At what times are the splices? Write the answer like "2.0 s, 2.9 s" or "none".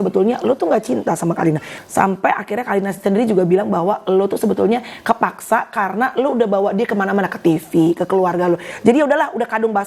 1.7 s